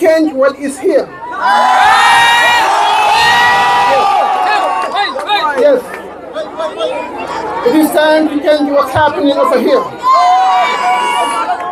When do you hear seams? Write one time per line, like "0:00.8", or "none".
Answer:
none